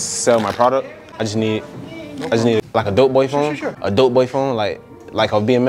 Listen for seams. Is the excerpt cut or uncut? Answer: cut